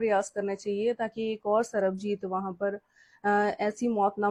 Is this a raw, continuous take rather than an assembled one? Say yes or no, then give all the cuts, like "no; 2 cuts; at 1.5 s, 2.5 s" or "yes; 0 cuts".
yes; 0 cuts